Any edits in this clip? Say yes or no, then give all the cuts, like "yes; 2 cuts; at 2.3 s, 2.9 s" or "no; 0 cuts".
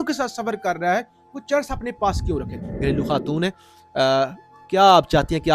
yes; 1 cut; at 2.6 s